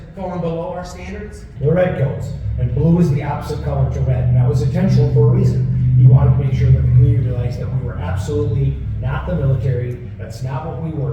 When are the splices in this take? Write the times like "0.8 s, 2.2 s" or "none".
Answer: 1.4 s